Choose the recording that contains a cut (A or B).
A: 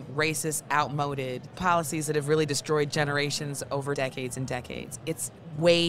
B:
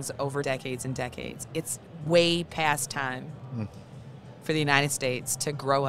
A